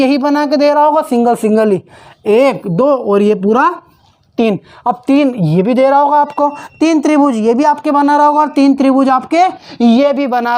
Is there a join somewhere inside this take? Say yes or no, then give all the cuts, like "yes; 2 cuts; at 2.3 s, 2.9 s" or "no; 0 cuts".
no; 0 cuts